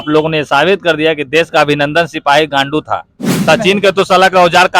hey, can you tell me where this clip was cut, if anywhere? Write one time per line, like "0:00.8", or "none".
0:03.3